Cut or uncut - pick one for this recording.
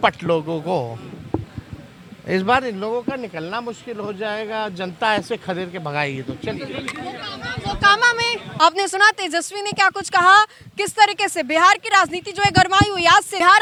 uncut